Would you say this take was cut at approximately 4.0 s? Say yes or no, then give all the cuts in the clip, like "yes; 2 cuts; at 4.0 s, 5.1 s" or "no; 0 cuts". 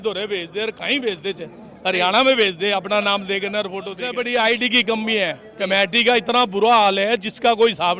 yes; 1 cut; at 4.0 s